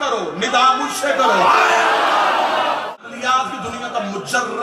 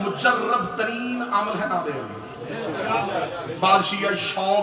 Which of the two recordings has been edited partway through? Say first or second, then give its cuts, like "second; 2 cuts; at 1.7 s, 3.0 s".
first; 1 cut; at 3.0 s